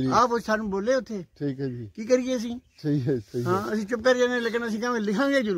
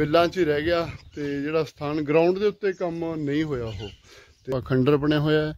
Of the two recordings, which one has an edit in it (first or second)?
second